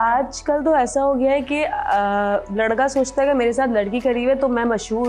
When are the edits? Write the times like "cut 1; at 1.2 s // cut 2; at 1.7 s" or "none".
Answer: none